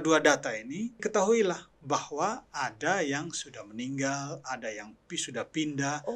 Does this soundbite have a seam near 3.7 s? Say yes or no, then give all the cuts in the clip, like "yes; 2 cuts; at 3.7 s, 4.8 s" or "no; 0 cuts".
no; 1 cut; at 1.0 s